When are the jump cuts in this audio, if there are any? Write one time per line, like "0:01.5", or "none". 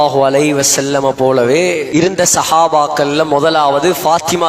0:01.9